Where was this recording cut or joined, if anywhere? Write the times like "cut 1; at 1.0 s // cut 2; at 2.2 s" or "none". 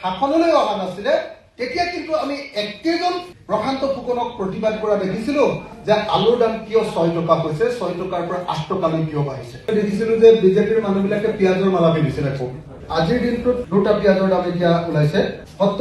none